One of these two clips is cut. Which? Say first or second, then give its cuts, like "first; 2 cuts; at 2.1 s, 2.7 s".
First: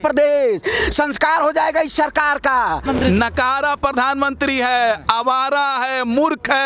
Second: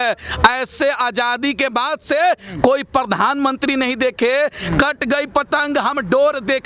first; 1 cut; at 2.8 s